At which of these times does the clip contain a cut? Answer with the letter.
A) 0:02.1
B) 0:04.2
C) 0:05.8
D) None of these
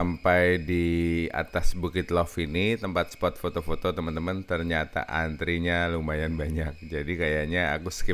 D